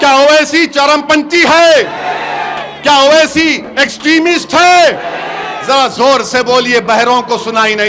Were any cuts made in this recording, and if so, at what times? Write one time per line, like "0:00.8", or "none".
none